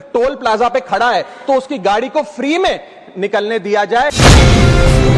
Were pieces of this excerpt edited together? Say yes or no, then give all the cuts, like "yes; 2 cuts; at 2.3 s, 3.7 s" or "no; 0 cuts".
yes; 1 cut; at 4.1 s